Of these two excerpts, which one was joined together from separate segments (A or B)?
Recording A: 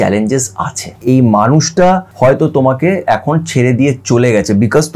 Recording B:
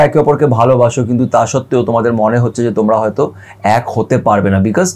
A